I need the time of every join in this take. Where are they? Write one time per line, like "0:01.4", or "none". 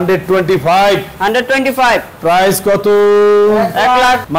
none

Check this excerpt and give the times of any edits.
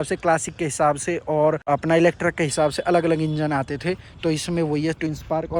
none

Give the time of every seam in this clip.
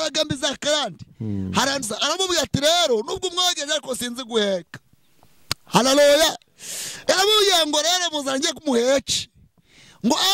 0:01.8

